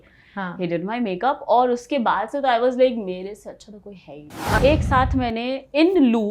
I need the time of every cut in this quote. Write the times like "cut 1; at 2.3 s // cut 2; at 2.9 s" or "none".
cut 1; at 4.6 s